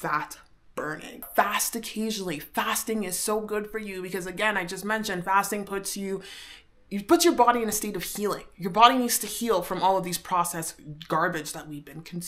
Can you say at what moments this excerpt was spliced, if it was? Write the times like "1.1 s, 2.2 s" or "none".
1.2 s